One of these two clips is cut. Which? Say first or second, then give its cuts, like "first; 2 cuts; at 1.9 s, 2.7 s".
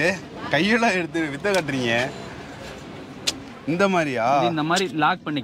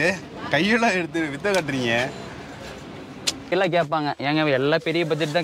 second; 1 cut; at 3.5 s